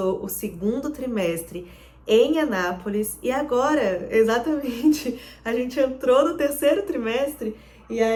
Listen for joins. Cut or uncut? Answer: uncut